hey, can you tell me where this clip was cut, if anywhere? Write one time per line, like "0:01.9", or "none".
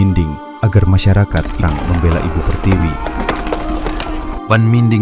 0:01.6